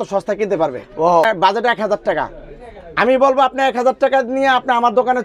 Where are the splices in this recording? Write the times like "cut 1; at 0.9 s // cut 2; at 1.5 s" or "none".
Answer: cut 1; at 1.2 s